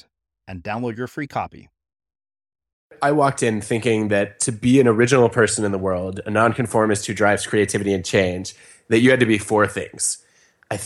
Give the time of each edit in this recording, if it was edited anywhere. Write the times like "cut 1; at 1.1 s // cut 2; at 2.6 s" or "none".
cut 1; at 3.0 s

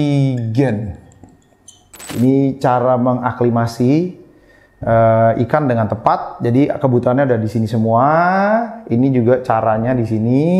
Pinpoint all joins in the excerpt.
cut 1; at 2.1 s

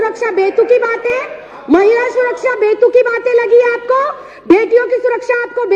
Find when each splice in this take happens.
cut 1; at 1.0 s

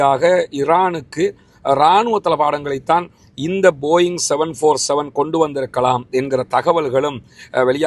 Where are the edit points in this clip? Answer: none

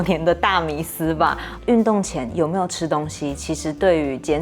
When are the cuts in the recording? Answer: cut 1; at 1.5 s

